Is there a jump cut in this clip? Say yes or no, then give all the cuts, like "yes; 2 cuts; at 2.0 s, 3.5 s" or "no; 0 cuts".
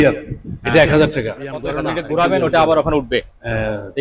yes; 1 cut; at 1.7 s